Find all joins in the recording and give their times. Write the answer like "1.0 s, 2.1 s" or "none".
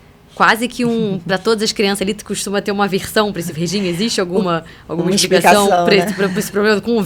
none